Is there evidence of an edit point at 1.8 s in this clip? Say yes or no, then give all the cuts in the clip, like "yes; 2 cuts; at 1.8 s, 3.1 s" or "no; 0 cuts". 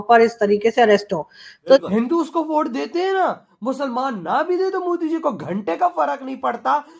yes; 1 cut; at 1.8 s